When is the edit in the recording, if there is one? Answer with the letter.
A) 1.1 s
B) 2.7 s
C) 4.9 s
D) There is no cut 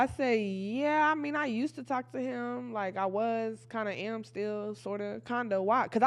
D